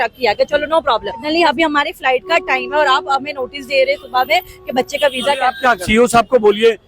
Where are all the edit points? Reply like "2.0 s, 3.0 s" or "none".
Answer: 1.2 s, 5.8 s

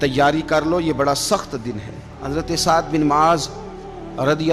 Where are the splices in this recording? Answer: 2.2 s

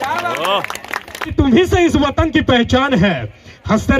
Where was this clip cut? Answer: 1.3 s

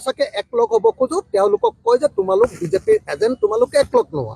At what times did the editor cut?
none

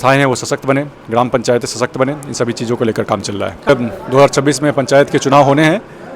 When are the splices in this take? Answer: 3.7 s

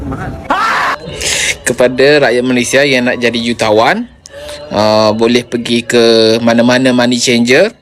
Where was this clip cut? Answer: 0.9 s

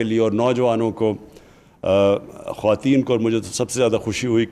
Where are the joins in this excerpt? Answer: none

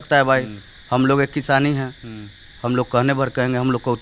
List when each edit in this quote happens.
none

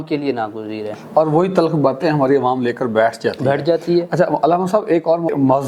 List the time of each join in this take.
none

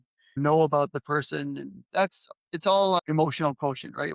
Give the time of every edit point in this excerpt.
none

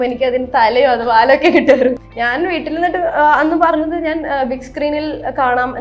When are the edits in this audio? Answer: 2.1 s

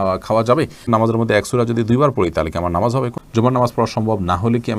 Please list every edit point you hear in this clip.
0.8 s, 3.2 s

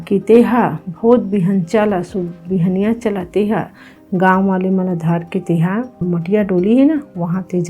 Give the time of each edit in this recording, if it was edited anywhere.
6.0 s

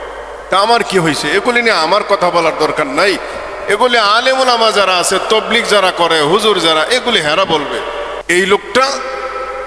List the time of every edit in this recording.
8.2 s

